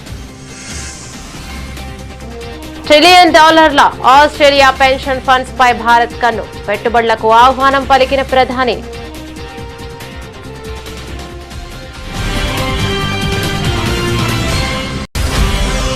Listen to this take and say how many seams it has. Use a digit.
1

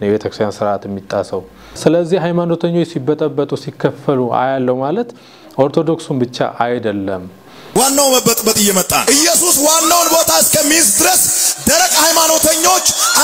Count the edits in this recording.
2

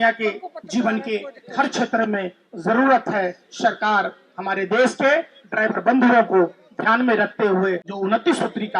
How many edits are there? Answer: 1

